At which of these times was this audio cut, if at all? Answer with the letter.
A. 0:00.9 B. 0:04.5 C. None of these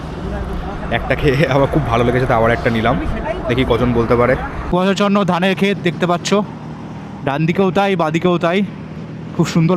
B